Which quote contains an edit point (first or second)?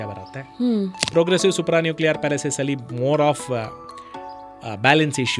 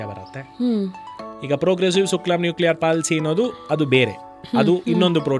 first